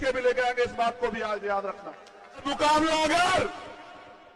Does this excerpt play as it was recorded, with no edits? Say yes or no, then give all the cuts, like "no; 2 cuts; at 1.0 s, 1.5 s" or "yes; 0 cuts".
no; 1 cut; at 2.4 s